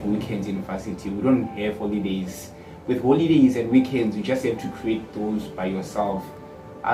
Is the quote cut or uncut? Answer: uncut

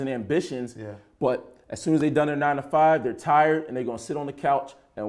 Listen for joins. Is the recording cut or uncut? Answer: uncut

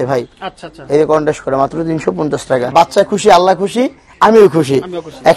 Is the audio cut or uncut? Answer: cut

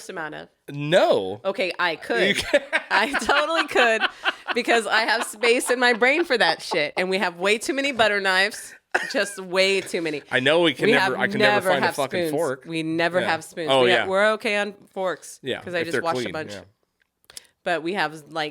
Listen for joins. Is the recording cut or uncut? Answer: uncut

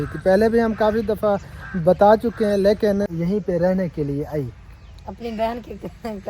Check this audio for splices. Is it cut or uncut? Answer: cut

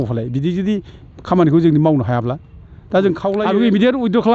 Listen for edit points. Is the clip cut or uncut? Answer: cut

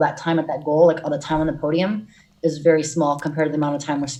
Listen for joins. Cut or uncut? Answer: uncut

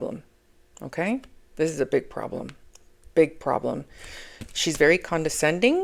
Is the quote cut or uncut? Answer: uncut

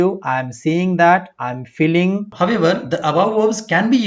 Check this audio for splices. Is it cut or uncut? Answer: cut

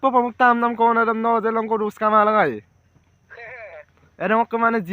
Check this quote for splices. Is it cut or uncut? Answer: cut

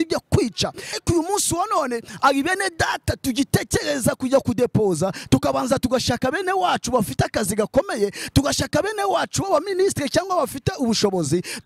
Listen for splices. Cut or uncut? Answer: cut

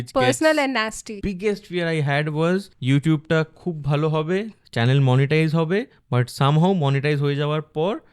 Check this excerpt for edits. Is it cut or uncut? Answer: cut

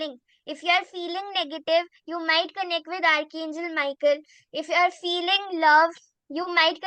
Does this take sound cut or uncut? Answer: uncut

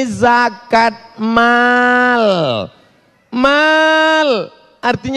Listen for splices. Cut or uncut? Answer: uncut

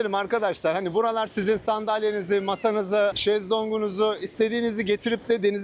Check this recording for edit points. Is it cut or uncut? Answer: cut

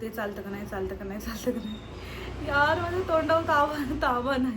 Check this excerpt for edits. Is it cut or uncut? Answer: uncut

